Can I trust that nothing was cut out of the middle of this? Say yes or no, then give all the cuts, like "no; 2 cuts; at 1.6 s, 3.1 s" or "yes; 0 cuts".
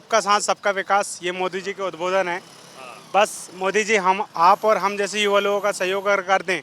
yes; 0 cuts